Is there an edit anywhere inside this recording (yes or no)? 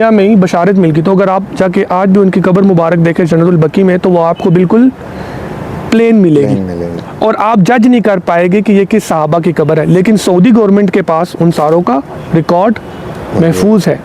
no